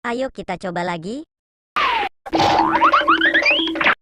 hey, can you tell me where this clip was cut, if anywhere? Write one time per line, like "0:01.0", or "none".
0:01.8